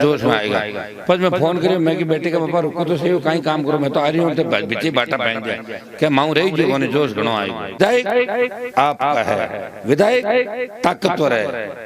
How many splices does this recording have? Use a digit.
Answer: 1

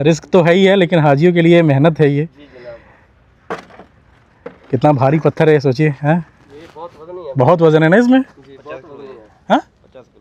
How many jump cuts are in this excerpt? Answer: 0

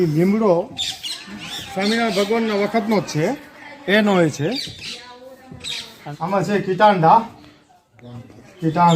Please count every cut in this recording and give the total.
1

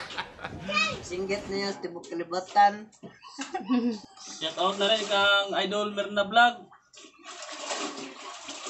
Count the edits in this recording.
1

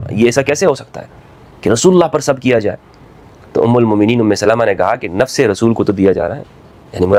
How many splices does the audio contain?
0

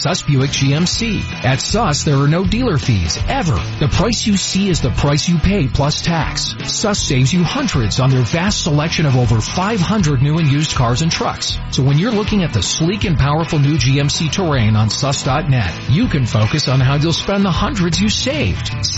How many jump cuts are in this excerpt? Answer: 0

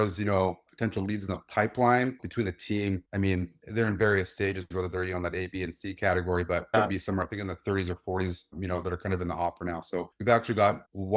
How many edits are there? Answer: 2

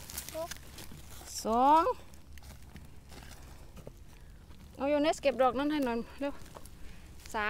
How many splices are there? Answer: 0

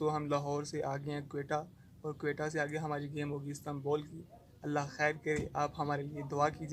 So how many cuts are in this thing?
0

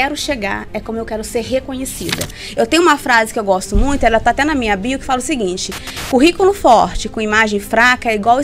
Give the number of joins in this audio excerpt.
1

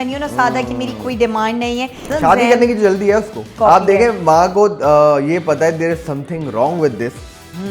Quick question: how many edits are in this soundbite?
2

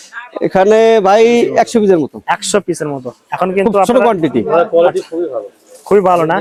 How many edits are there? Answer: 0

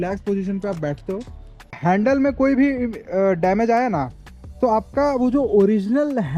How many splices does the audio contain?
1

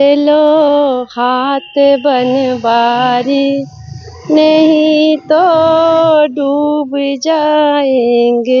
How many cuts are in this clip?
0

